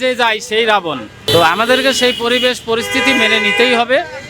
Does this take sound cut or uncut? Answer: uncut